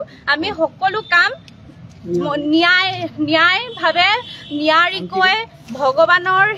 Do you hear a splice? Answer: no; 0 cuts

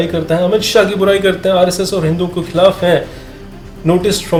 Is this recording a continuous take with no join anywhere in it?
yes; 0 cuts

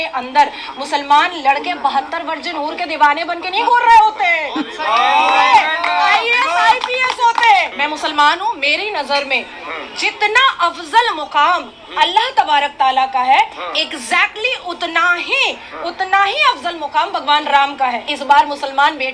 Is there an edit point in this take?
yes; 2 cuts; at 7.7 s, 18.0 s

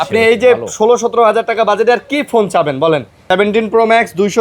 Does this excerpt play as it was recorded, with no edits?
no; 1 cut; at 3.2 s

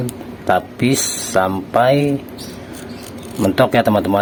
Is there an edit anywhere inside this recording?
no; 0 cuts

